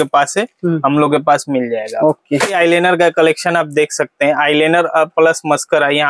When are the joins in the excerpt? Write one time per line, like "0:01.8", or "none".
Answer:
none